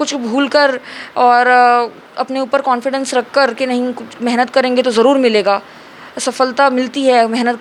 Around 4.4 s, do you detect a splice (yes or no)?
no